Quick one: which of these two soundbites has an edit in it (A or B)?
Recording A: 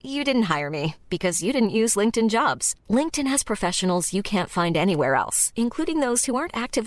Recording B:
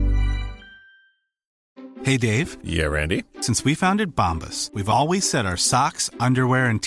B